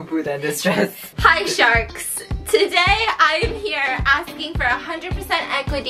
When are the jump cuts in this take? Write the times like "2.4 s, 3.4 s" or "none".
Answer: none